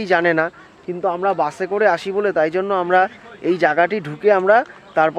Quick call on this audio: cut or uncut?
uncut